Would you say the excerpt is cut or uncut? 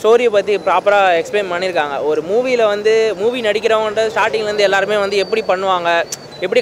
uncut